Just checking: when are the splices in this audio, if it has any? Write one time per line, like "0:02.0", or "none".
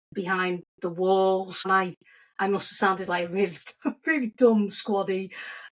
0:01.7